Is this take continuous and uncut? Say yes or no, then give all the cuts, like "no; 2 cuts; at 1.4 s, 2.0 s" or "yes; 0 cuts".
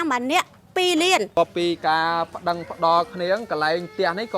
no; 1 cut; at 1.4 s